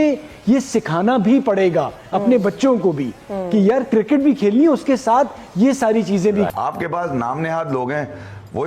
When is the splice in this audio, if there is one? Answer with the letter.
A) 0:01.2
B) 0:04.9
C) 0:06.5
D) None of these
C